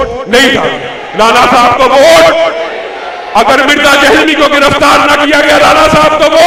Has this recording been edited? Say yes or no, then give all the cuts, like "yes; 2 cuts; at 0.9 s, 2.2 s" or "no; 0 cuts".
no; 0 cuts